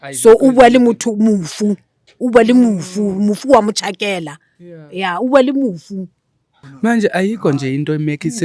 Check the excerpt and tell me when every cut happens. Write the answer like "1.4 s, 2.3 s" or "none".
none